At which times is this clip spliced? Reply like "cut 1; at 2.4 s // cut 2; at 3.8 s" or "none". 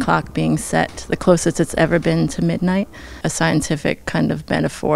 cut 1; at 3.2 s